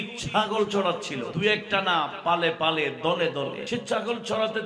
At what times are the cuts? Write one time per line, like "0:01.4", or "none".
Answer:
0:01.3
0:03.6

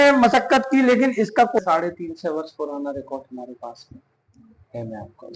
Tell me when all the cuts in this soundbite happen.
0:01.6

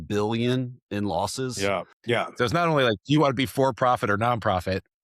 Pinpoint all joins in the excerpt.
0:01.9

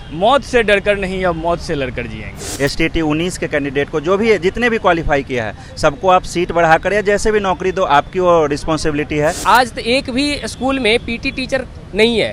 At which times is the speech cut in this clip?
0:02.5
0:09.4

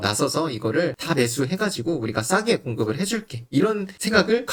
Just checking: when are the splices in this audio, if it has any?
none

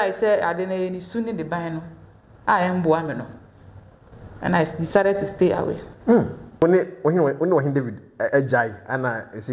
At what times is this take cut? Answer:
0:06.6

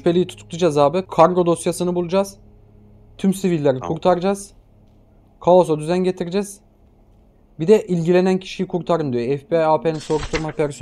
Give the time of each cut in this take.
0:01.0

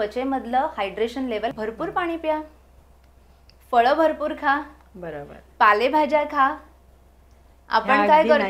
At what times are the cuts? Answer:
0:01.5

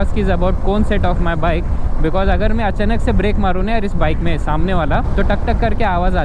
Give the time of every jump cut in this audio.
none

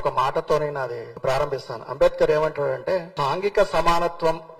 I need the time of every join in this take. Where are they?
0:01.1
0:03.1

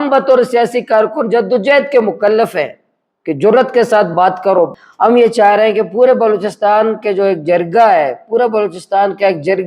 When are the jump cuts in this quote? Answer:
0:04.8

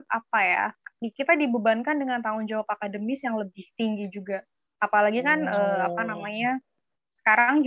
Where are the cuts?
none

